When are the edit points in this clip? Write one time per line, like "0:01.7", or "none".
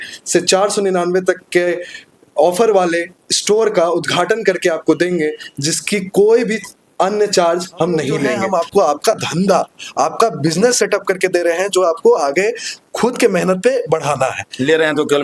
0:08.4

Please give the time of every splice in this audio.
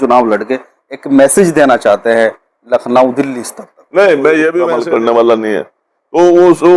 0:04.7

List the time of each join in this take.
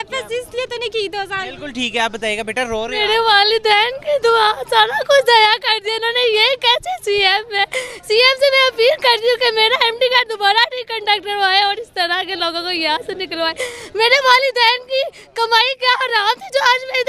none

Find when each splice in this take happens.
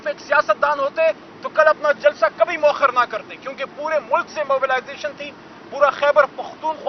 none

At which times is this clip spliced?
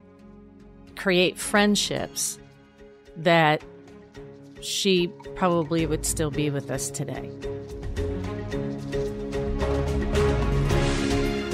0:07.2

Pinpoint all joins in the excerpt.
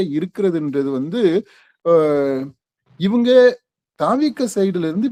none

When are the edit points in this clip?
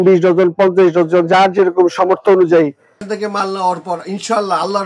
0:03.0

